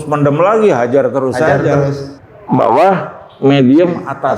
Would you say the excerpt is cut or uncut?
cut